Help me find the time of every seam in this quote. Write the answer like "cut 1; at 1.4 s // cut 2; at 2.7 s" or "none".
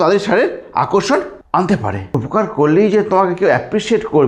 cut 1; at 1.4 s // cut 2; at 2.1 s